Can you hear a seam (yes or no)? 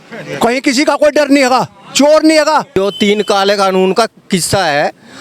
yes